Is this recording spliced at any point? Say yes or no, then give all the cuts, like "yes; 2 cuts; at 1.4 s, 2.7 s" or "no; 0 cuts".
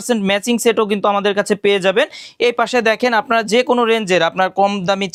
no; 0 cuts